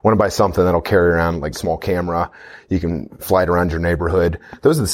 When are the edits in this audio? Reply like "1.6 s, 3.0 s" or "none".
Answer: 1.6 s